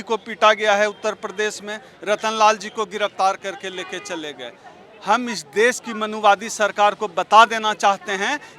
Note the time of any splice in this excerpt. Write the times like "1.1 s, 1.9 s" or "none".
none